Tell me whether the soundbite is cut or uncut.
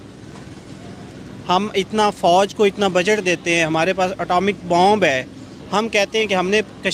uncut